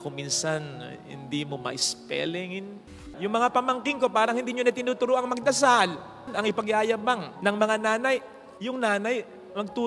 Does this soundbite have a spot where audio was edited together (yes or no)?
yes